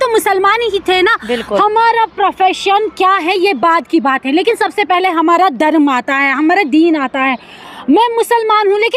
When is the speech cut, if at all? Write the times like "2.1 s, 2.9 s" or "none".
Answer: none